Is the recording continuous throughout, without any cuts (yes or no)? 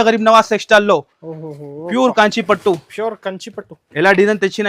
yes